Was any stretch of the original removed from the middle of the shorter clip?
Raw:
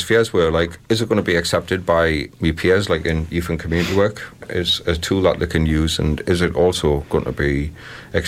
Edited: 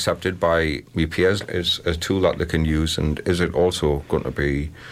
yes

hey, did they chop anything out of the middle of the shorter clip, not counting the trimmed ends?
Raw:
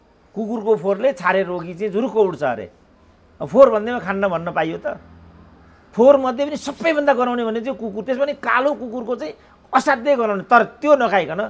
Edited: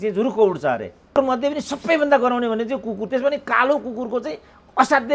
yes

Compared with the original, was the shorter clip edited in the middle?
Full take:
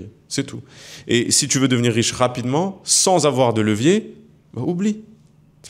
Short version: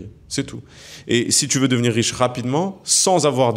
no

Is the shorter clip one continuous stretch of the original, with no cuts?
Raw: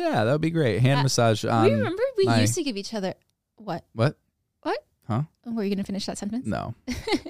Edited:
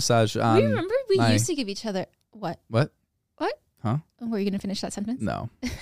no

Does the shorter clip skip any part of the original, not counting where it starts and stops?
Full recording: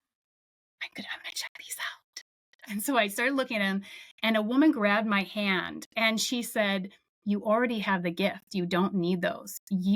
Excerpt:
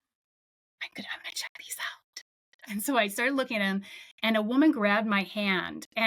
no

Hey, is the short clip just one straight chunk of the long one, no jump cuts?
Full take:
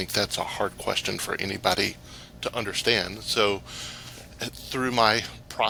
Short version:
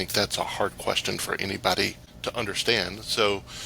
no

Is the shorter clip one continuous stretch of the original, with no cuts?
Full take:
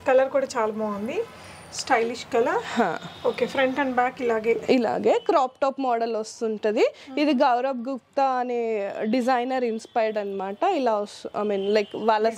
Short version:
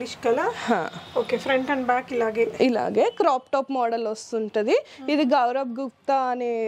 yes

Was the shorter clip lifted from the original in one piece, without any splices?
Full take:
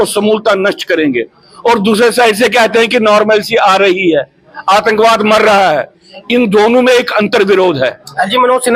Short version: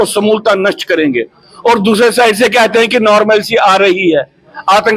yes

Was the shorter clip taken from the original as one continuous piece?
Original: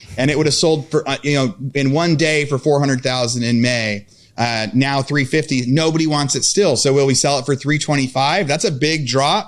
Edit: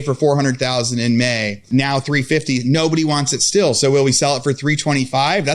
no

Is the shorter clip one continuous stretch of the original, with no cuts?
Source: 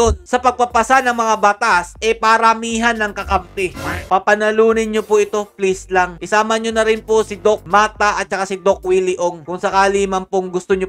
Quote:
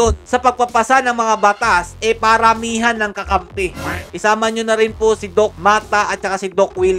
no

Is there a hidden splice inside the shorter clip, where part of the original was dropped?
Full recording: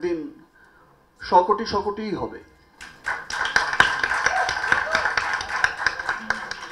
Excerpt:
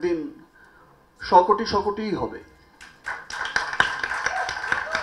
no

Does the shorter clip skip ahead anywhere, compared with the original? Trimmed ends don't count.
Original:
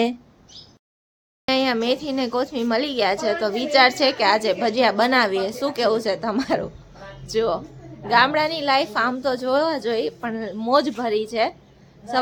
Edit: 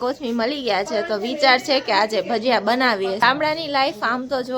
yes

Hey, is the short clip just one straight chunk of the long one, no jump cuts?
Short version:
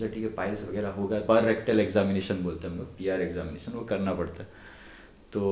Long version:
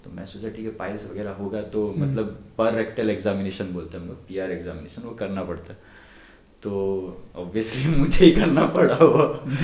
no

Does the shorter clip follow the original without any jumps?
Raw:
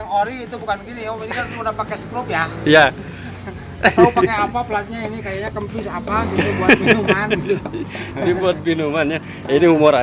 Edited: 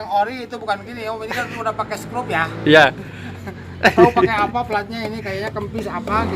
yes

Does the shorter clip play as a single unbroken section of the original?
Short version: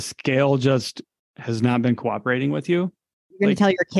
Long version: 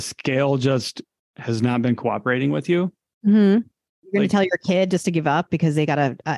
no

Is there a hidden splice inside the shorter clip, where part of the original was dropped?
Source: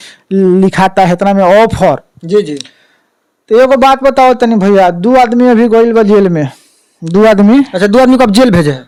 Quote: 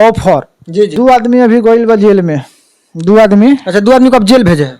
yes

